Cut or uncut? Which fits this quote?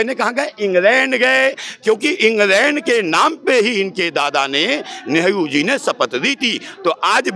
uncut